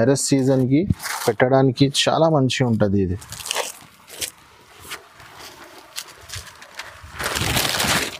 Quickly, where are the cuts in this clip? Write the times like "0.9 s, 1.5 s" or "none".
none